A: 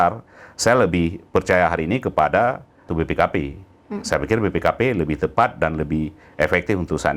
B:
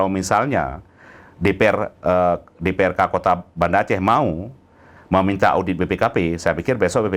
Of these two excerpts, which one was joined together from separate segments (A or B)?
A